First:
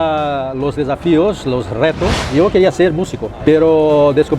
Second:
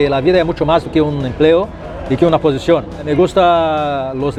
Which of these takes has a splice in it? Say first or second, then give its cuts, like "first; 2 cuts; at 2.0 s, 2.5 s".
first; 1 cut; at 2.2 s